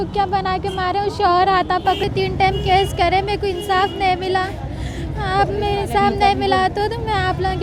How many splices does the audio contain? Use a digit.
0